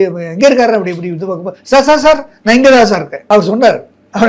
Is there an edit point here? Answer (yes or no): yes